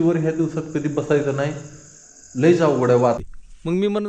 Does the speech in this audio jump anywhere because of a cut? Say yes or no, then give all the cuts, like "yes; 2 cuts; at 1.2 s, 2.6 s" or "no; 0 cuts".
yes; 1 cut; at 3.2 s